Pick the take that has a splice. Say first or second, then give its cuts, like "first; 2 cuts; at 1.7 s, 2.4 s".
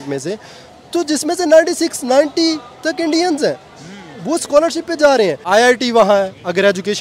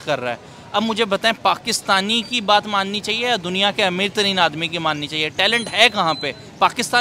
first; 1 cut; at 5.4 s